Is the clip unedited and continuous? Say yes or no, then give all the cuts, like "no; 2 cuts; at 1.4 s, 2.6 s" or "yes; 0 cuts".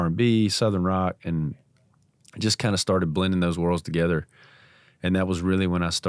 yes; 0 cuts